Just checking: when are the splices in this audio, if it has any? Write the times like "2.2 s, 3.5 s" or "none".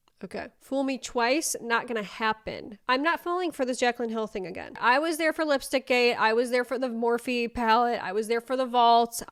none